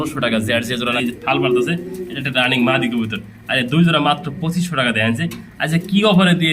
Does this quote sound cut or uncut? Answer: cut